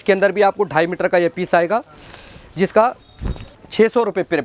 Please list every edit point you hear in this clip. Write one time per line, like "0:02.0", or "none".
none